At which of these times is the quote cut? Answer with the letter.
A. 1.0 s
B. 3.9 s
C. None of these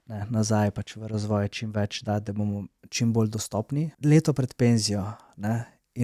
B